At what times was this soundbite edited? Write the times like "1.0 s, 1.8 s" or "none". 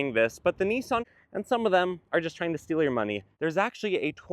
1.1 s, 3.3 s

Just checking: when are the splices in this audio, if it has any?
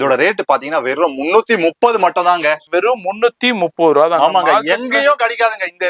2.6 s

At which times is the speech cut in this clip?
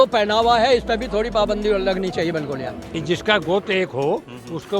2.9 s

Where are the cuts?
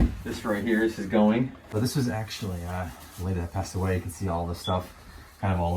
1.6 s

